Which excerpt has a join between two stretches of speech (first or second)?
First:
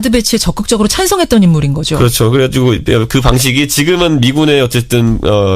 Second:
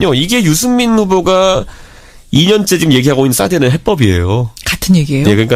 first